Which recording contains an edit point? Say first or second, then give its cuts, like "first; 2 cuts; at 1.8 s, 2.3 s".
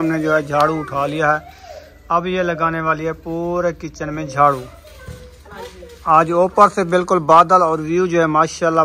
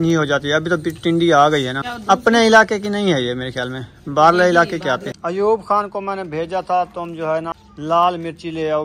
second; 3 cuts; at 1.9 s, 5.1 s, 7.6 s